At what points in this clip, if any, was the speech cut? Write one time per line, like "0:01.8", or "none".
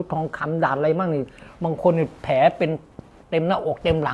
none